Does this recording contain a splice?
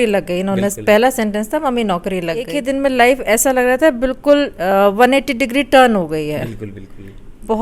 yes; 1 cut; at 2.5 s

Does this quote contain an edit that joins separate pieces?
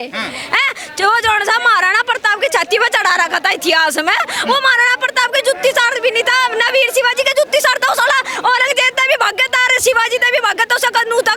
no; 0 cuts

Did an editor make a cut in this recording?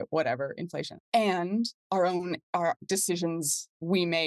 yes; 3 cuts; at 1.0 s, 1.8 s, 2.8 s

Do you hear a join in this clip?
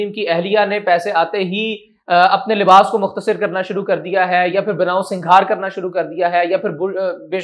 no; 0 cuts

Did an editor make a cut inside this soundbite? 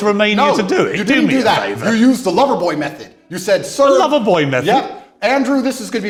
no; 0 cuts

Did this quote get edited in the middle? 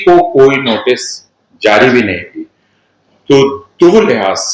no; 0 cuts

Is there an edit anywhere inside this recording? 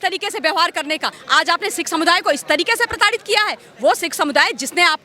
yes; 1 cut; at 1.2 s

